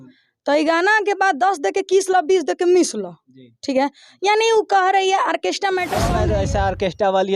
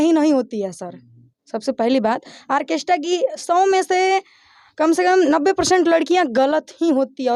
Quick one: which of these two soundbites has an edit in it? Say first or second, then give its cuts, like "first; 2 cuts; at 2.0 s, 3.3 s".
first; 1 cut; at 6.2 s